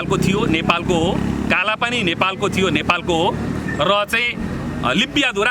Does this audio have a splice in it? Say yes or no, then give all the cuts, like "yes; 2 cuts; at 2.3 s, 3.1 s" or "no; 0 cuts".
no; 0 cuts